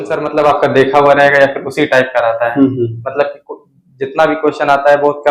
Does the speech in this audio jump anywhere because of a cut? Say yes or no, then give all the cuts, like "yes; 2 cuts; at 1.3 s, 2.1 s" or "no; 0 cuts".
no; 0 cuts